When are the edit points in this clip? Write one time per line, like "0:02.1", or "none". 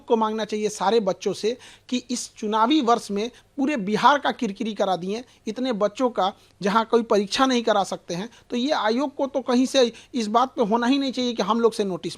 none